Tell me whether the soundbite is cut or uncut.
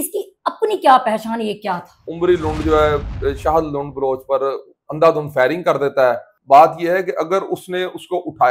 cut